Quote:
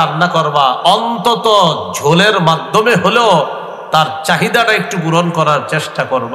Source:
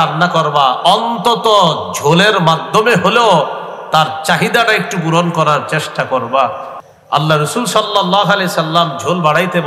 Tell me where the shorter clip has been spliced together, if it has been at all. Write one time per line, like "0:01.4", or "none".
none